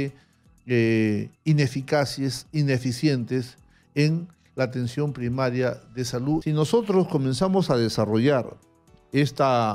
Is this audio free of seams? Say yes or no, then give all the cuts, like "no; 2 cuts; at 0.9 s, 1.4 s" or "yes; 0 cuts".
no; 1 cut; at 6.4 s